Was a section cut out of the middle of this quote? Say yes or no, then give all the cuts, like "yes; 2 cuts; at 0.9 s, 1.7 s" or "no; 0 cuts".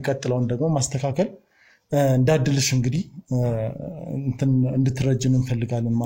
no; 0 cuts